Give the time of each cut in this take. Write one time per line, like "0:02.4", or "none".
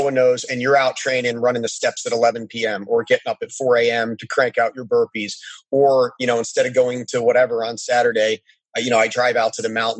none